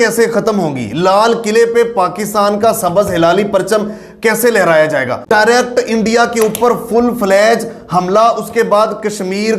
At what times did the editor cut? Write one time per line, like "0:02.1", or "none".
0:05.2